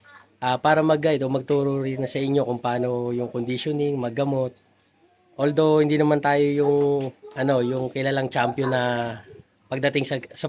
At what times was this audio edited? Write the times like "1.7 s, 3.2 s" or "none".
none